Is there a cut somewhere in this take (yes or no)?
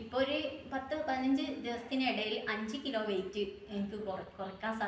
no